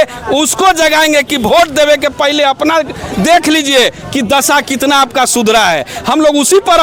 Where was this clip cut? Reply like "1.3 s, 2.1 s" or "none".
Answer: none